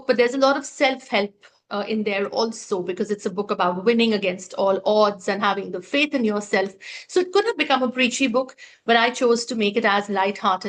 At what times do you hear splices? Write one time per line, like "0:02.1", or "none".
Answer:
none